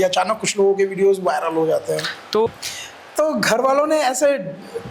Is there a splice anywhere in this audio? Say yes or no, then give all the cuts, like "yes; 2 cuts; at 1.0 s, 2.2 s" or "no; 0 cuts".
yes; 1 cut; at 2.5 s